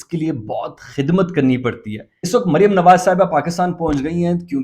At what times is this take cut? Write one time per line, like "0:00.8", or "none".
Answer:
0:02.1